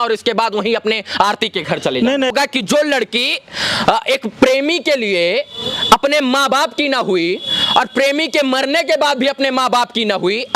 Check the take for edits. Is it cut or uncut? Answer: cut